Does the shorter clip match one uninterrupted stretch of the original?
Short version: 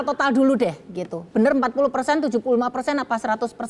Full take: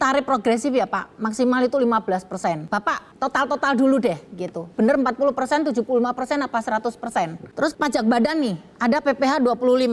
yes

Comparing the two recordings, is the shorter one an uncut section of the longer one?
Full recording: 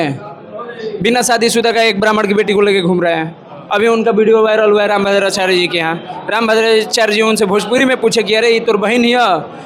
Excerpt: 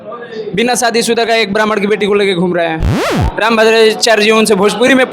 no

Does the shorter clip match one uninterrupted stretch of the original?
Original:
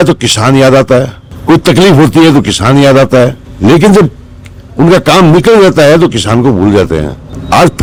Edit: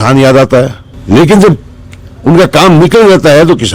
no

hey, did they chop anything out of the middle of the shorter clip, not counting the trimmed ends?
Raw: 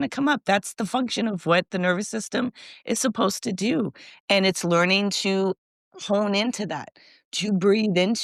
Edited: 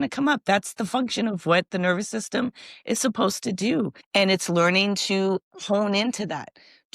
yes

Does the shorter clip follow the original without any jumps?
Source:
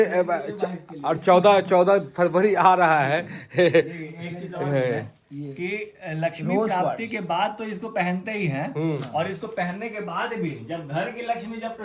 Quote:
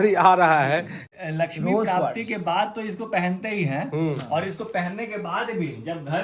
no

